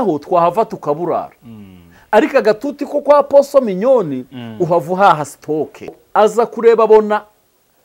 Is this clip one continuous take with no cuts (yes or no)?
no